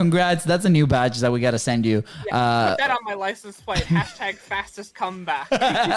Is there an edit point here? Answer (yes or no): no